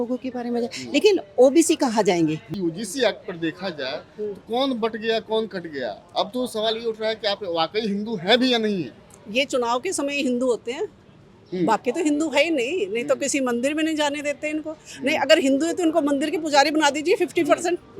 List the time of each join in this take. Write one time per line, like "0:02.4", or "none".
0:02.5